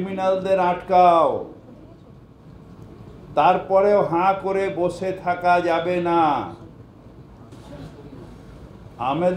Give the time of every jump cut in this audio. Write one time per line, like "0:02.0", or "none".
0:07.5